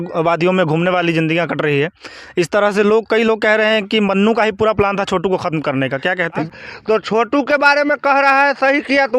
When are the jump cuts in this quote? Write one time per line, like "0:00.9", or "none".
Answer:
0:06.4